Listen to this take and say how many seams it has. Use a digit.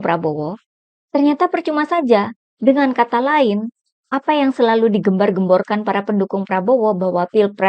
1